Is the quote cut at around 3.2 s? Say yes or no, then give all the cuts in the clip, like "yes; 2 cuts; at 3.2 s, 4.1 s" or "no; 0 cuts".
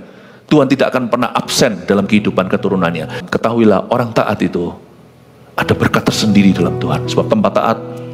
yes; 1 cut; at 3.2 s